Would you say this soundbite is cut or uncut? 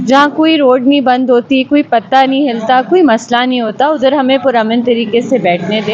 uncut